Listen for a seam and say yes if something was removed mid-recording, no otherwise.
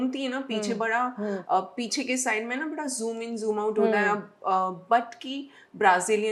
no